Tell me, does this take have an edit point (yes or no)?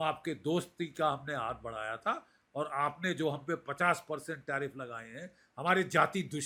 no